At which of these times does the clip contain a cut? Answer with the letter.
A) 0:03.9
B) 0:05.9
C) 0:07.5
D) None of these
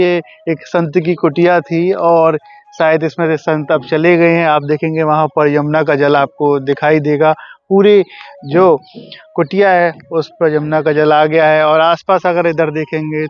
D